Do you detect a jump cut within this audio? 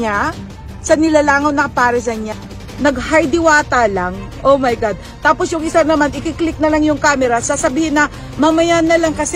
yes; 1 cut; at 2.3 s

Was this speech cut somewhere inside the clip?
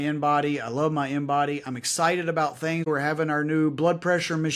yes; 1 cut; at 2.9 s

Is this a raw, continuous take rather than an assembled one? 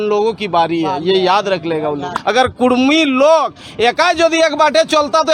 no; 1 cut; at 2.1 s

